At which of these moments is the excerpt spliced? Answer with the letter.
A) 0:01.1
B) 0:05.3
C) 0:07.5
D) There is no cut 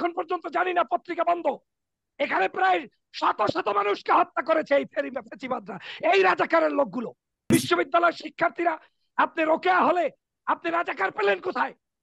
C